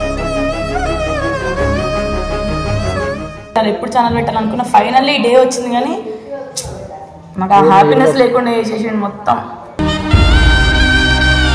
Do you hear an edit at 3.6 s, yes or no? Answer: yes